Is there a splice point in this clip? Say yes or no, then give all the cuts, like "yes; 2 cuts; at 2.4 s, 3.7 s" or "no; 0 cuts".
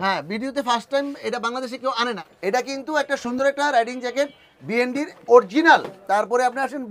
yes; 2 cuts; at 2.2 s, 5.9 s